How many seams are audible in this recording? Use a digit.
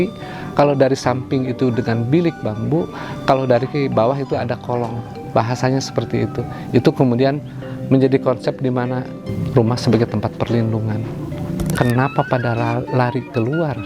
1